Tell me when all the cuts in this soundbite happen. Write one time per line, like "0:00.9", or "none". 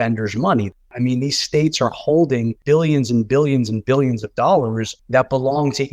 0:00.8
0:02.5
0:04.9